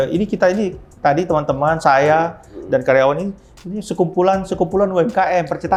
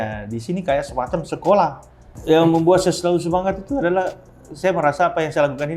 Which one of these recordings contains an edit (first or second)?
second